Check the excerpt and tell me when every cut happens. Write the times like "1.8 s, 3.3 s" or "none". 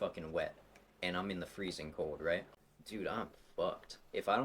2.5 s